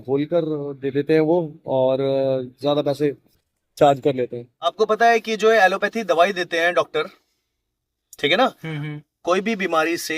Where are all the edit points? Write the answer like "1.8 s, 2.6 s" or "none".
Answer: 4.7 s